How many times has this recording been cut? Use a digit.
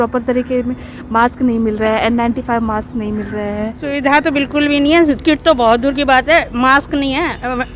1